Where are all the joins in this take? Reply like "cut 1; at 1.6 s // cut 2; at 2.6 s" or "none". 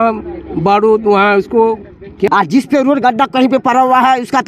cut 1; at 2.3 s